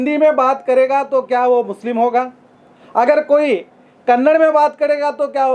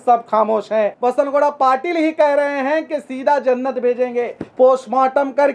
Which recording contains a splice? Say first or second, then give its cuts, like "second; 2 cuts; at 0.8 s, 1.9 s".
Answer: second; 1 cut; at 0.9 s